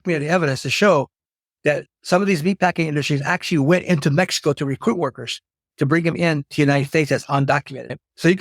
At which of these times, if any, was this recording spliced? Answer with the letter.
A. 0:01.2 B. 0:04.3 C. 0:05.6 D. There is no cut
D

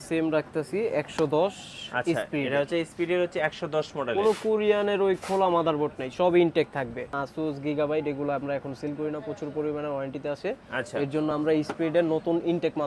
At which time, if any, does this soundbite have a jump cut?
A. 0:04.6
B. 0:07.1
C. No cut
B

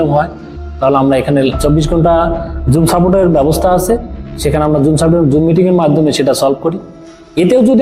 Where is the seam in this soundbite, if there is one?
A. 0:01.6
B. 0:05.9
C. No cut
A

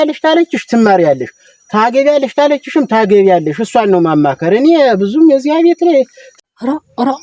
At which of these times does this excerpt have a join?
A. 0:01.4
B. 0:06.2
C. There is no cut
B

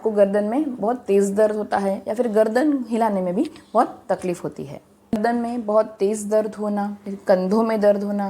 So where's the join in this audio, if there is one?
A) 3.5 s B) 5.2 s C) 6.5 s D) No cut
B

